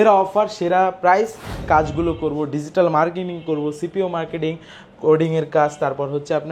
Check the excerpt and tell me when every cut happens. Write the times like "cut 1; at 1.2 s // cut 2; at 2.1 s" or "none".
cut 1; at 1.6 s